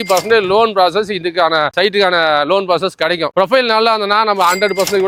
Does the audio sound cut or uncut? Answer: uncut